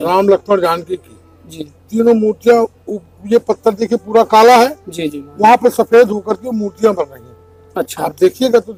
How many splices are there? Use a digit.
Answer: 0